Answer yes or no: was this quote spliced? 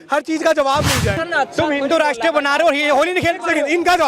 yes